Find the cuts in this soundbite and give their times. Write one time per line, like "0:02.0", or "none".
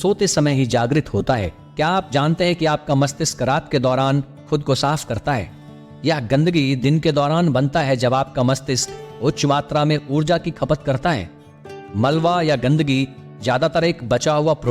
0:01.6